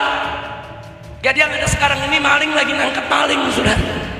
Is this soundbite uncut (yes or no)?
yes